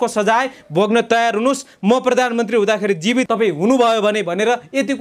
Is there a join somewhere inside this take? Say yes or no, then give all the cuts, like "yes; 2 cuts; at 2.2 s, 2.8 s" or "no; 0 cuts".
yes; 1 cut; at 3.3 s